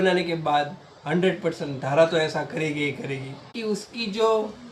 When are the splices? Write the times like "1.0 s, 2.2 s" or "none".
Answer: 3.5 s